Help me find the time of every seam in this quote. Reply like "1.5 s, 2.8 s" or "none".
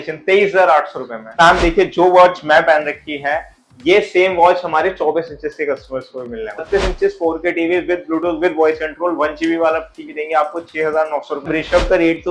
1.3 s, 6.6 s, 11.5 s